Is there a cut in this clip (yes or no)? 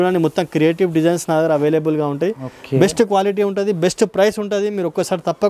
no